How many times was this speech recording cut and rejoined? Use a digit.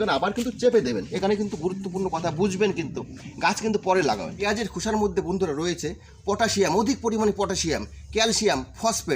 1